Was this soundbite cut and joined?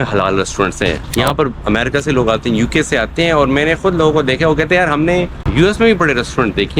yes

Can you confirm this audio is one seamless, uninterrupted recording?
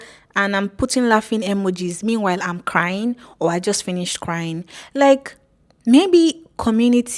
yes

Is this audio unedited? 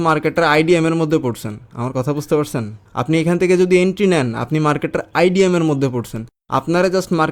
yes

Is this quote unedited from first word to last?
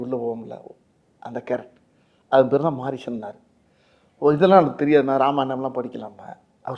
yes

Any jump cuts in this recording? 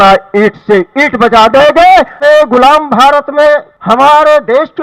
yes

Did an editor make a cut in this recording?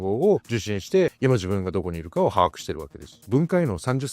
yes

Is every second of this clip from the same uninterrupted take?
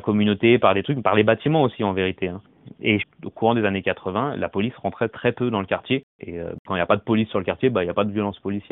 no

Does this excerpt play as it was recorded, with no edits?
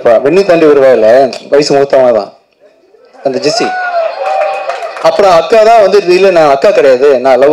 yes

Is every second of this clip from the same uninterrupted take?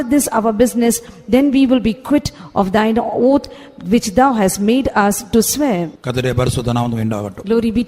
no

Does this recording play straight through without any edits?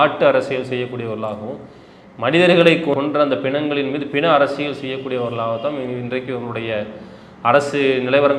no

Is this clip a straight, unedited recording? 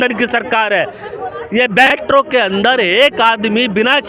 no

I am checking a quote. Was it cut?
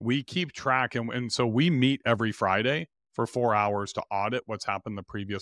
no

